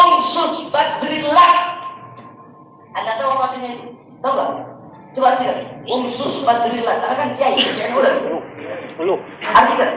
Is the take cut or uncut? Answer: uncut